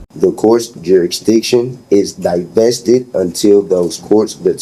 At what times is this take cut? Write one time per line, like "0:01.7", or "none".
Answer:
none